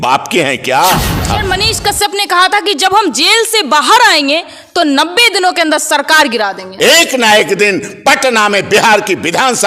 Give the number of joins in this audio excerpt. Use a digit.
2